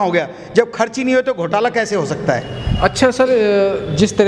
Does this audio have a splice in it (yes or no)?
no